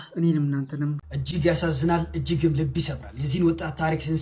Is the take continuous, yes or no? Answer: no